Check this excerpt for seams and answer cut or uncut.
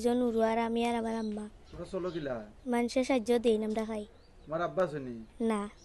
uncut